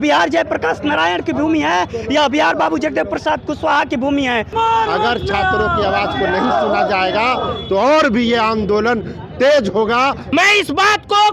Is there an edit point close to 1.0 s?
no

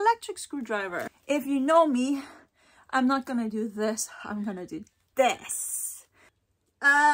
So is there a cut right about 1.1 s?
yes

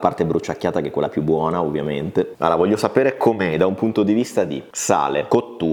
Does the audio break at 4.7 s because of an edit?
no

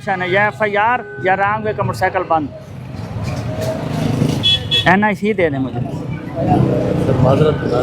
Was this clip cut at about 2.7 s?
no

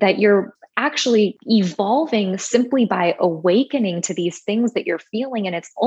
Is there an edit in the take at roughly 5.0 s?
no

